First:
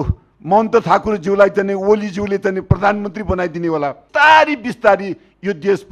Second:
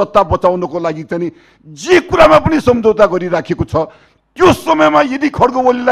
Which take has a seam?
first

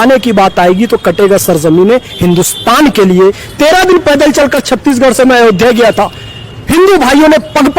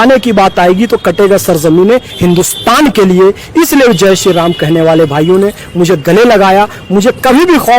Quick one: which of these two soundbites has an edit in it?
first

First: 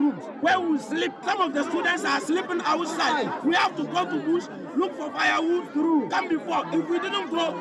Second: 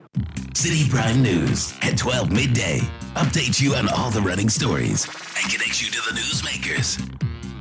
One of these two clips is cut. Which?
first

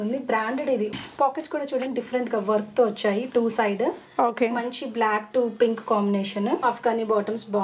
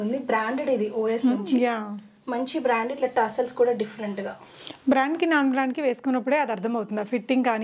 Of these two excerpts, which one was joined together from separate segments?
first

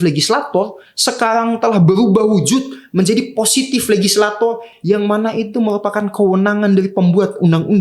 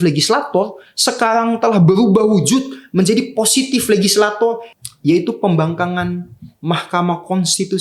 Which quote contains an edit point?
second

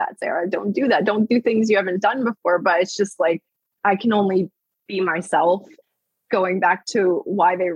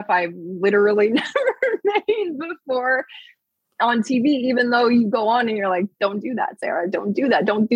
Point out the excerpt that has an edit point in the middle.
first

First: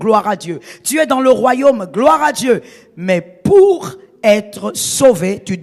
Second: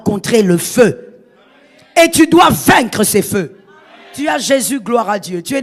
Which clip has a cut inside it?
second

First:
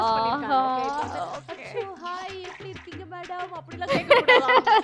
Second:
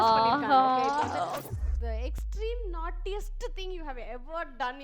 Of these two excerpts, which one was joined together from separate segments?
second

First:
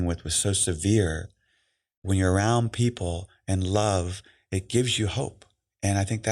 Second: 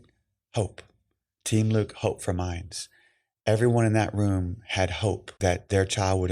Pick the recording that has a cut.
second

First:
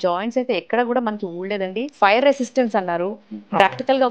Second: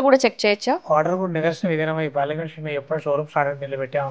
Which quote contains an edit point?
first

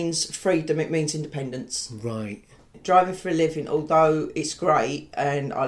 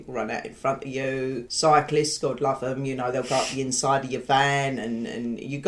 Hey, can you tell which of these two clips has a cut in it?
first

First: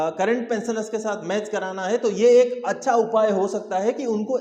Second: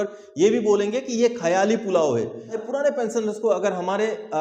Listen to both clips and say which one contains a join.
second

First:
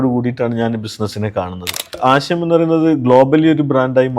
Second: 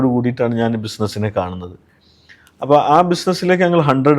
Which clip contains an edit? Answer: first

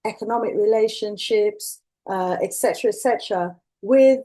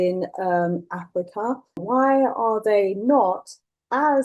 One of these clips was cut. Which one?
second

